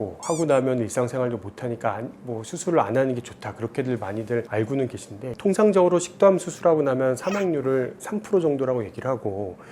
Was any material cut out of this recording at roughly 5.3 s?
yes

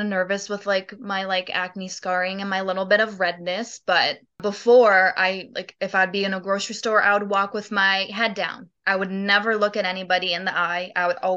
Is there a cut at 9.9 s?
no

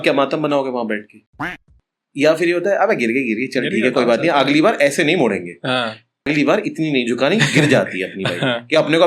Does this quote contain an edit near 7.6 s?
no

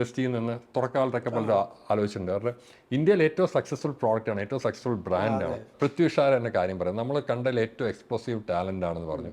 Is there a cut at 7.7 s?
no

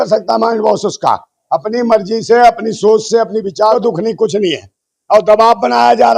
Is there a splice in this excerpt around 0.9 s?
no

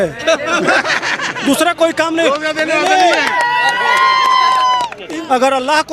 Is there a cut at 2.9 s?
no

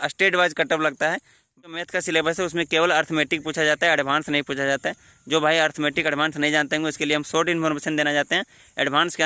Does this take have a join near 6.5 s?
no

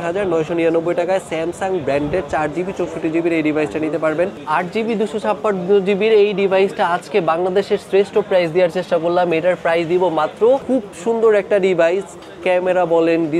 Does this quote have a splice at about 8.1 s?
no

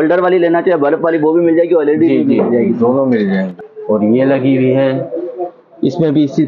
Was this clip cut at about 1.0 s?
no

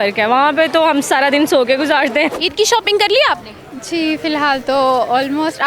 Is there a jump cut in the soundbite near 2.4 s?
yes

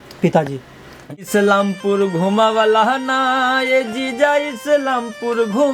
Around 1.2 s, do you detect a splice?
yes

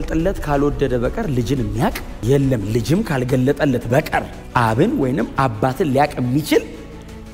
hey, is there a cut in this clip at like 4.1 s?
no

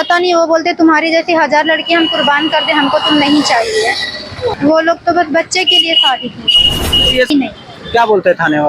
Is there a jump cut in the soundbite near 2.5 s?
no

